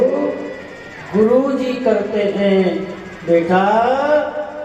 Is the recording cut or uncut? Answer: uncut